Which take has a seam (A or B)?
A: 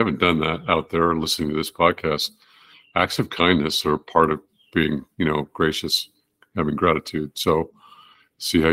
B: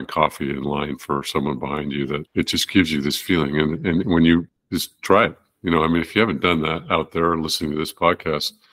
B